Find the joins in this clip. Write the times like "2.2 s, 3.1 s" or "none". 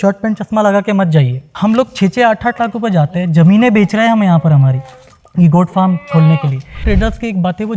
1.5 s, 6.8 s

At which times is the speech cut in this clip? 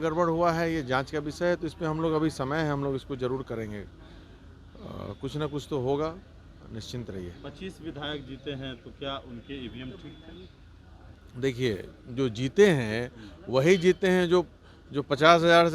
none

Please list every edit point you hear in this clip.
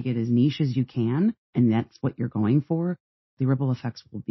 1.4 s, 3.1 s

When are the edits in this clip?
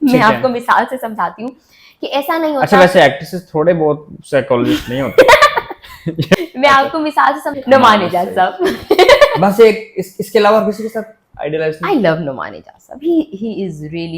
6.3 s, 7.5 s

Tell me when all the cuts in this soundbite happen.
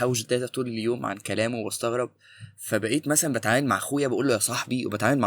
none

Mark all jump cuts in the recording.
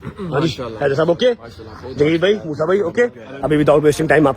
3.3 s

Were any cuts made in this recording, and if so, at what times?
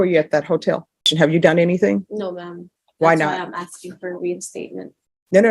1.1 s

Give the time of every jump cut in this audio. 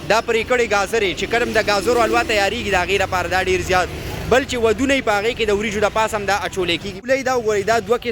7.0 s

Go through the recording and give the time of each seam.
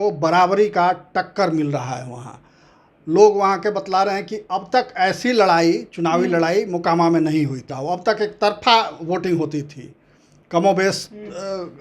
7.7 s

